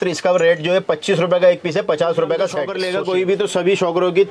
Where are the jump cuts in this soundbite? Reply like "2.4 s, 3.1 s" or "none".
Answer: 2.7 s